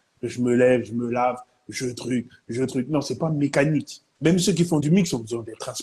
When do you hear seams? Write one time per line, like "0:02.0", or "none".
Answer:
0:04.0